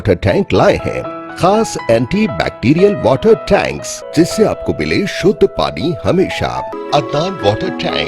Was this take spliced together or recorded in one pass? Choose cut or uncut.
cut